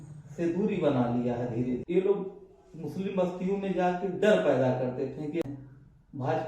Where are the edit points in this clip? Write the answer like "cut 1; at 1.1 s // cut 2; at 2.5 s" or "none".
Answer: cut 1; at 1.8 s // cut 2; at 5.4 s

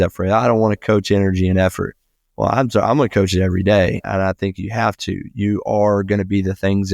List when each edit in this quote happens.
cut 1; at 4.0 s

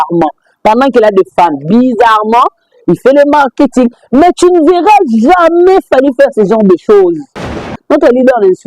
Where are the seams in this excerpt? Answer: cut 1; at 7.8 s

